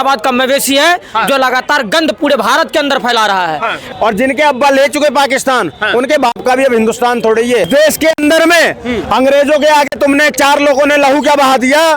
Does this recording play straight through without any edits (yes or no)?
no